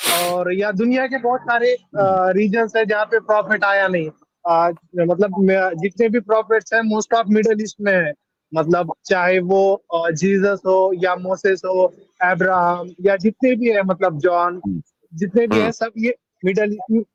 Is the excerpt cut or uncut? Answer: uncut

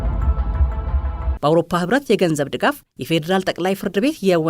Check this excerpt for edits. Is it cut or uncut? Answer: cut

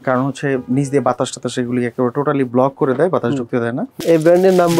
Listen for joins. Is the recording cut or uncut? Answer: cut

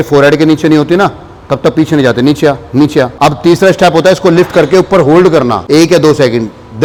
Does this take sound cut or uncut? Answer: uncut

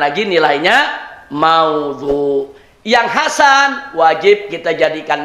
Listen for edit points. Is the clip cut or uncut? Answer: uncut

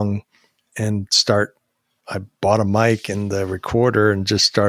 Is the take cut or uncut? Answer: uncut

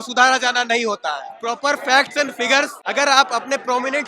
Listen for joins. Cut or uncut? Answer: cut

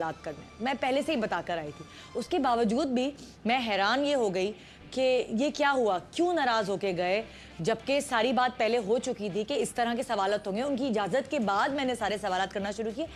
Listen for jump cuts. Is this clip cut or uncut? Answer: uncut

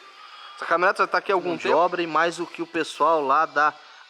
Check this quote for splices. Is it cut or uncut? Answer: cut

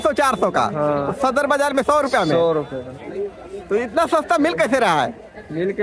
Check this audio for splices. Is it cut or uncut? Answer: uncut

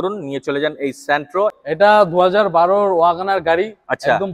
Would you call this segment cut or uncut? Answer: cut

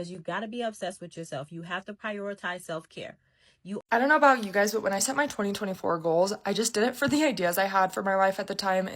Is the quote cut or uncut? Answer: cut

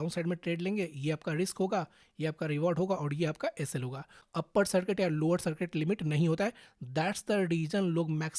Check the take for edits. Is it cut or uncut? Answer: cut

